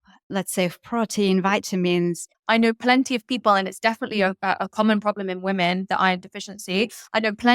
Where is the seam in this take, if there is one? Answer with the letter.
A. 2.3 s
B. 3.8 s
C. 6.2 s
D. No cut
A